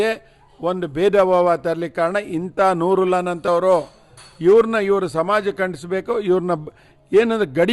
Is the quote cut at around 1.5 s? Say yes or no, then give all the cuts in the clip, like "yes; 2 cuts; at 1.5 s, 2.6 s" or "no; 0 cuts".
no; 0 cuts